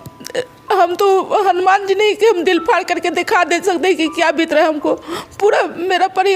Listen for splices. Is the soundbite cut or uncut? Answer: uncut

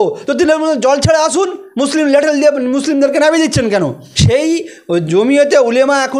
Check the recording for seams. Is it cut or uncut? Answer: cut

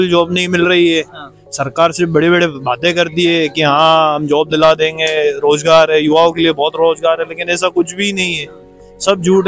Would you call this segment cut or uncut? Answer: uncut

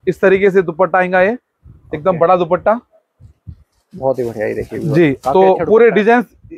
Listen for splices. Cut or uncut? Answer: uncut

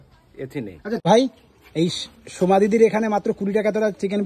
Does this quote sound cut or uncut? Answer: cut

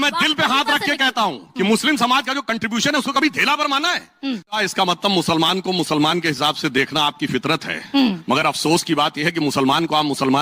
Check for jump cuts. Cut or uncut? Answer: cut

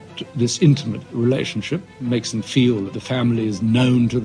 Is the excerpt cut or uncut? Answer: cut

